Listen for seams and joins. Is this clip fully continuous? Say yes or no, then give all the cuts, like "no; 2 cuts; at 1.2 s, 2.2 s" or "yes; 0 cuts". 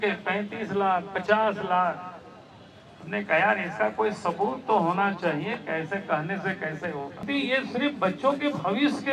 no; 1 cut; at 7.3 s